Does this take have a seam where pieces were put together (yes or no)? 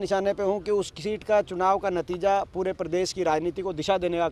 no